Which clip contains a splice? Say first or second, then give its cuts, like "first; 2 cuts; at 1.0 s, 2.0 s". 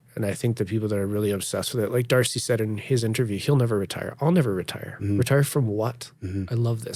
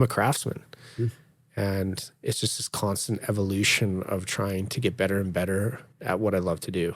second; 1 cut; at 5.9 s